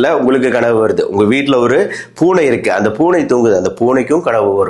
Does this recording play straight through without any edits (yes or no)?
yes